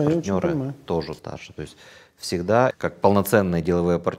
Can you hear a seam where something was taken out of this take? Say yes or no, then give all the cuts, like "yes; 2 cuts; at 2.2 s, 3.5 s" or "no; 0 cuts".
yes; 2 cuts; at 1.2 s, 2.8 s